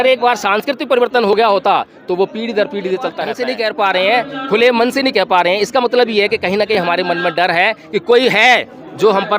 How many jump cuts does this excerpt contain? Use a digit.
1